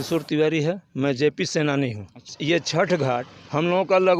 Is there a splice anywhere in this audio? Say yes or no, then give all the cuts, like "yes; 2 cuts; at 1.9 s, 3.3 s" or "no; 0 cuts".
yes; 1 cut; at 2.3 s